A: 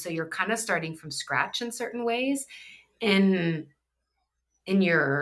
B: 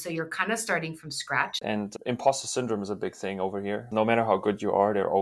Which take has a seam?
B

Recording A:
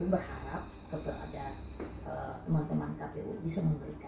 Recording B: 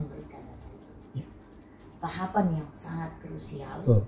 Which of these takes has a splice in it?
B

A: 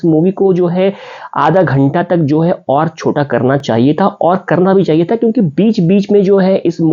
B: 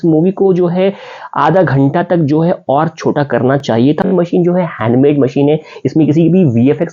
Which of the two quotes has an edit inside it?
B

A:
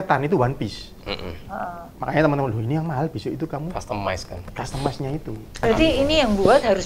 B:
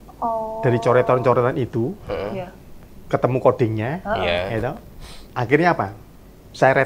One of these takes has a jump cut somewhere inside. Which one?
A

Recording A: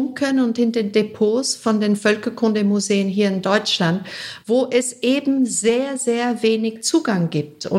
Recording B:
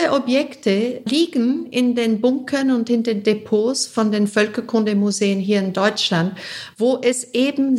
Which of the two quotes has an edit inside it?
B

